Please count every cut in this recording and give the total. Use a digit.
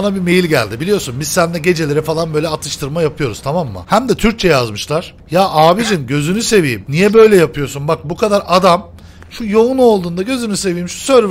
3